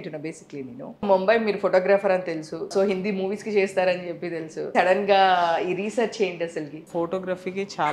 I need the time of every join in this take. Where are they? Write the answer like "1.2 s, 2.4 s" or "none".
1.0 s, 2.7 s, 4.6 s, 6.8 s